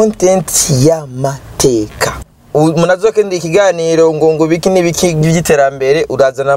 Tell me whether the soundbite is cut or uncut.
cut